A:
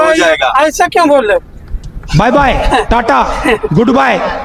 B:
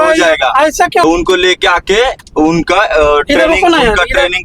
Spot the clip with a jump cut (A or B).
B